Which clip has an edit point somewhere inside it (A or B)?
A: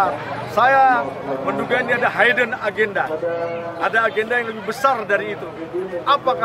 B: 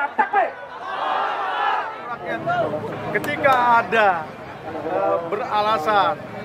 B